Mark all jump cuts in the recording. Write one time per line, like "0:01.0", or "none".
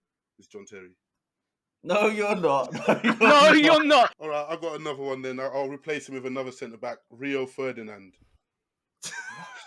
0:04.2